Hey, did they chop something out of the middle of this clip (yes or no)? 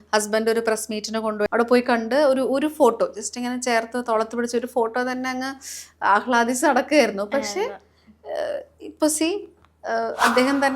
yes